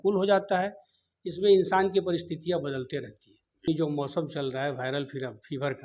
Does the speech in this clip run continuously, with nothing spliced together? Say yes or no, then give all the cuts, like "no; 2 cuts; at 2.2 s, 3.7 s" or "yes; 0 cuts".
no; 1 cut; at 3.7 s